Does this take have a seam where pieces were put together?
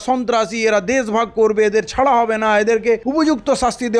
yes; 1 cut; at 3.0 s

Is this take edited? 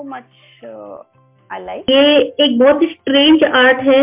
yes; 1 cut; at 1.9 s

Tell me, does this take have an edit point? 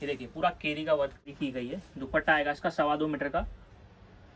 yes; 1 cut; at 1.3 s

